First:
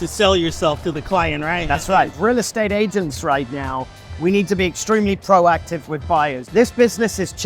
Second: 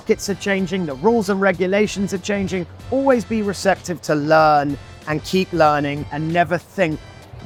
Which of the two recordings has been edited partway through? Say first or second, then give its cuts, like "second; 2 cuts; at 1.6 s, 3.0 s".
first; 2 cuts; at 2.1 s, 6.4 s